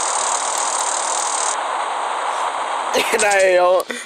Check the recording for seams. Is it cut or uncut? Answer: cut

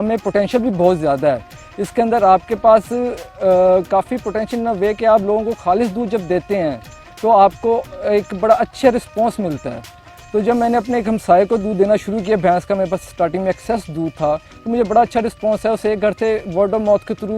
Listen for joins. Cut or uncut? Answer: uncut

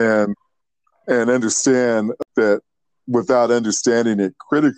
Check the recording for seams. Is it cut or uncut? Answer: cut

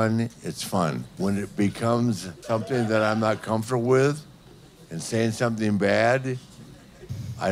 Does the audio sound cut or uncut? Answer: cut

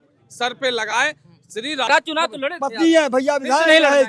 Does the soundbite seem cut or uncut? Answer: cut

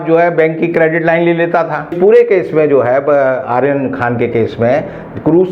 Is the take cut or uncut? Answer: cut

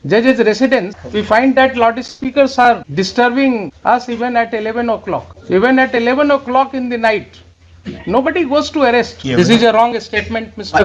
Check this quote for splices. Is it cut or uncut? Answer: cut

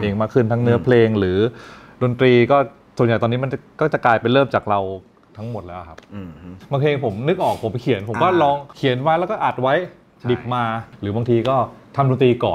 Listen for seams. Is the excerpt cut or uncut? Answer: cut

